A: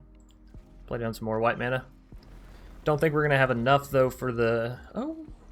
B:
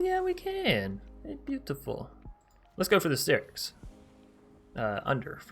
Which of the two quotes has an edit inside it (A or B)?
B